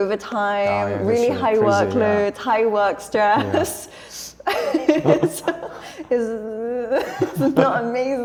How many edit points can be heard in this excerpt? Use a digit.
0